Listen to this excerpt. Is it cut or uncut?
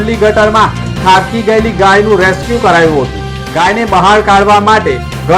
uncut